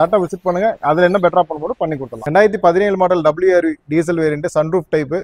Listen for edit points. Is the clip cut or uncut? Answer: cut